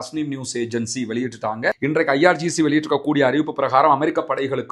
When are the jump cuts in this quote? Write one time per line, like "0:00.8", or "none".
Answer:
0:01.8